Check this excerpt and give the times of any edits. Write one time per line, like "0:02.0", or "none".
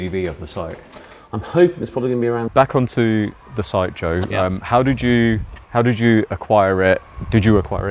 0:02.5